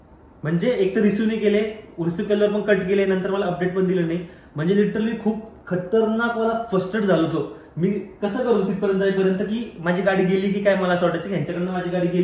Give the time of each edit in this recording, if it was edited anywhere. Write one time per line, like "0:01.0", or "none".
none